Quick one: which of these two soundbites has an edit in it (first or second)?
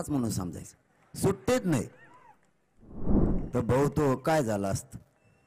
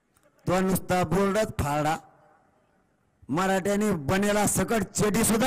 first